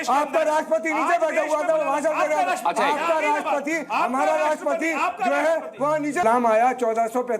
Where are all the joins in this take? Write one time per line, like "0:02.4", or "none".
0:06.2

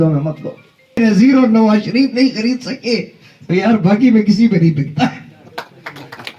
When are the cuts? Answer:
0:01.0

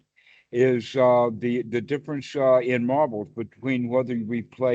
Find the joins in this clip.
none

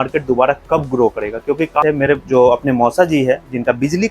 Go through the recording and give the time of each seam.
0:01.8

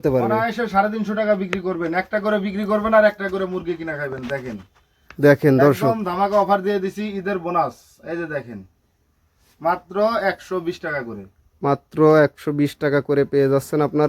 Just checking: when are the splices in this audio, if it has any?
none

